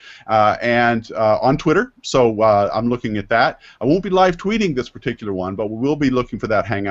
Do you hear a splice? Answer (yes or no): yes